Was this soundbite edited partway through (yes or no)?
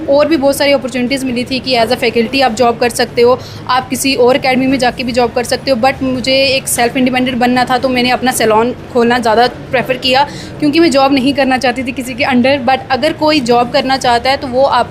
no